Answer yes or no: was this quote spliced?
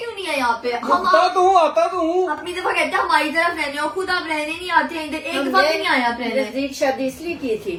no